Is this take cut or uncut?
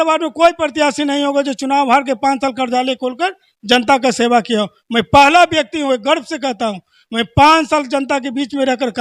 uncut